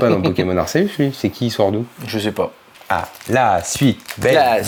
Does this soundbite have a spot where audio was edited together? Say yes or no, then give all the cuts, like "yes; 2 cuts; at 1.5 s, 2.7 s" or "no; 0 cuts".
no; 0 cuts